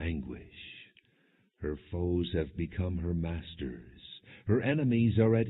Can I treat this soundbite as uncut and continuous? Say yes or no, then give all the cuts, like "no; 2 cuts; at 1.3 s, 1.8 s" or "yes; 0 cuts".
no; 1 cut; at 1.0 s